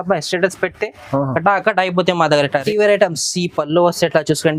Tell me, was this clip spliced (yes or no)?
yes